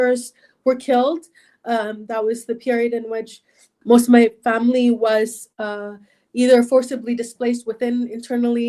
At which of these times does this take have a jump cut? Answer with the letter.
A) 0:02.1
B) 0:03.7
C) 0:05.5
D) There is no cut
B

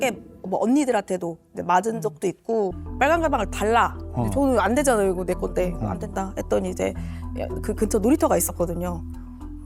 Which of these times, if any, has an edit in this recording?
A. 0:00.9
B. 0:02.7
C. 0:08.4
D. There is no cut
B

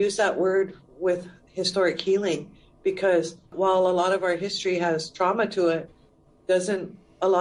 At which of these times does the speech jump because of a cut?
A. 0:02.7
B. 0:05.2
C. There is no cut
C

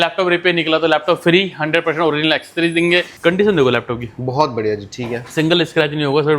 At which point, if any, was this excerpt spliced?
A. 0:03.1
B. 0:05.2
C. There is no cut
A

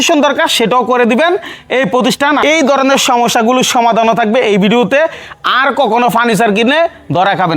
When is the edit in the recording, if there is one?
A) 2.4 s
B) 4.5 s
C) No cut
A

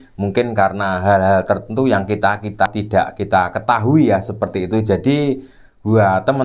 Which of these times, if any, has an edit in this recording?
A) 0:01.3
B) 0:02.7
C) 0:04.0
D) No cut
B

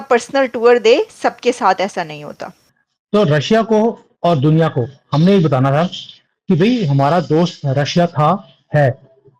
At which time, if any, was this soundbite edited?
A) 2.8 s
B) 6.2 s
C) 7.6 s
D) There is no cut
A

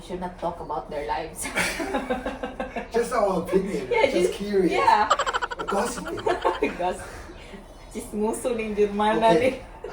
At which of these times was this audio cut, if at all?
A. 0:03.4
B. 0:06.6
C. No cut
C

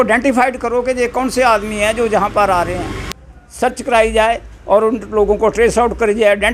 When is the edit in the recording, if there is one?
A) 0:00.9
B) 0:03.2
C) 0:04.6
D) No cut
B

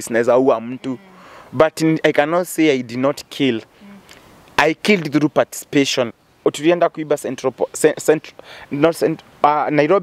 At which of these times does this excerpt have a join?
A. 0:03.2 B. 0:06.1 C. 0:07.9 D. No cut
B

